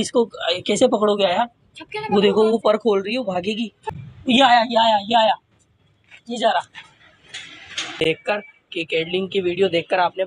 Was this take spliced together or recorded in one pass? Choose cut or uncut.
cut